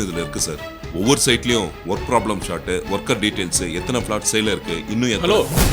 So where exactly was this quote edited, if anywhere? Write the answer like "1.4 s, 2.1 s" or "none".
none